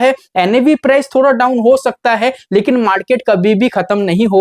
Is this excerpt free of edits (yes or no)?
yes